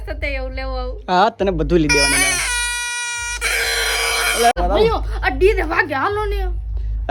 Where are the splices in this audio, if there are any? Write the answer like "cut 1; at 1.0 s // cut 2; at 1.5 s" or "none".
cut 1; at 4.5 s